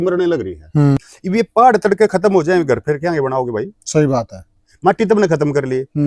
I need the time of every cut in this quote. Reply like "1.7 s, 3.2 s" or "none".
1.1 s